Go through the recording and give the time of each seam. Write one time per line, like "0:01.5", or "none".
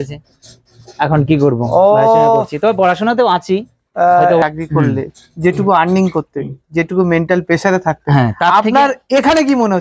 0:04.4